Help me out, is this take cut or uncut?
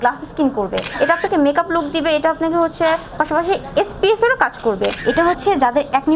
cut